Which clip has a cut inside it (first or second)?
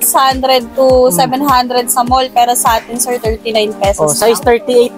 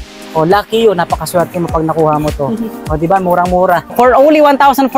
second